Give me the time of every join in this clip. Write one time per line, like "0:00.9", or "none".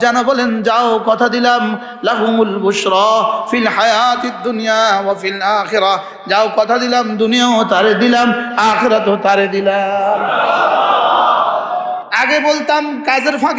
0:12.1